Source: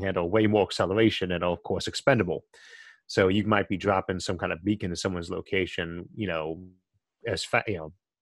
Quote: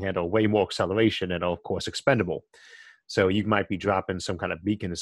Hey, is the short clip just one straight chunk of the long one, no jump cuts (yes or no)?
yes